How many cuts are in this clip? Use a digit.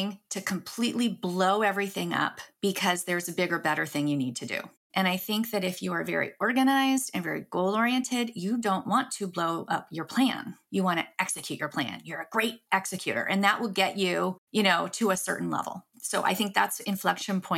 0